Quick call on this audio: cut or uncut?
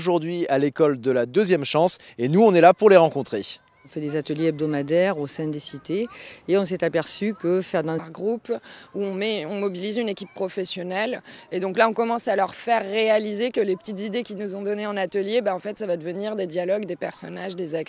uncut